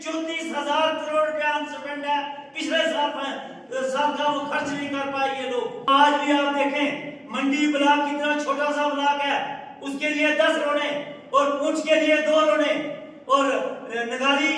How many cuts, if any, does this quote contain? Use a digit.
1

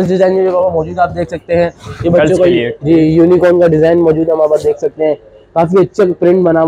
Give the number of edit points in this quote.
0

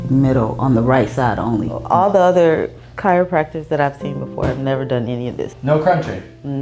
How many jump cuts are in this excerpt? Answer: 1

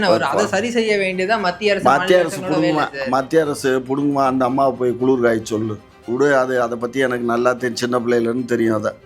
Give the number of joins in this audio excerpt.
1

